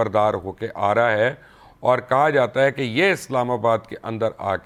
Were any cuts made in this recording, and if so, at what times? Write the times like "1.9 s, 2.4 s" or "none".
none